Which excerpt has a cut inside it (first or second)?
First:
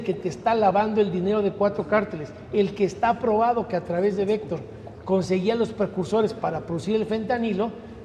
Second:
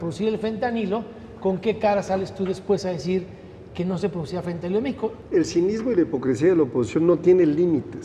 second